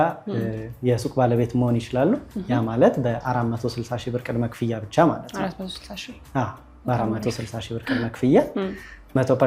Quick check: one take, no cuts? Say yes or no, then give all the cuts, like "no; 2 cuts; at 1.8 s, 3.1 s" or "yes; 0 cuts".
yes; 0 cuts